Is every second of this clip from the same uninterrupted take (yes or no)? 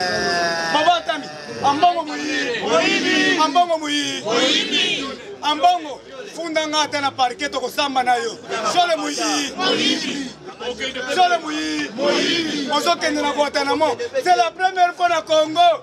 yes